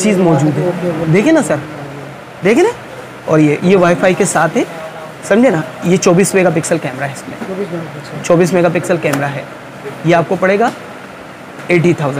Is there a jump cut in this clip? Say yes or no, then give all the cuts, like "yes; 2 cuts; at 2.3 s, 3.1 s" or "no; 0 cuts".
no; 0 cuts